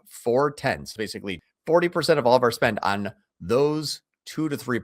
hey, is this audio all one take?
no; 1 cut; at 1.0 s

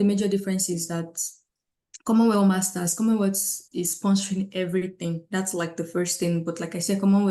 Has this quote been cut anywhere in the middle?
no; 0 cuts

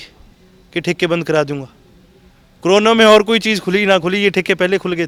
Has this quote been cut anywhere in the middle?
no; 0 cuts

